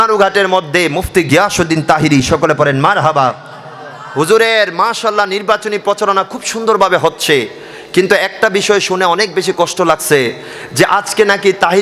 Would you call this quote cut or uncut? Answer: uncut